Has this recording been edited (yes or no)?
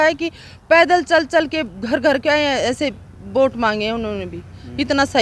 no